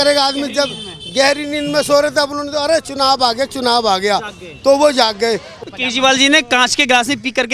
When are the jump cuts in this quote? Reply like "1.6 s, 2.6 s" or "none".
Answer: 5.5 s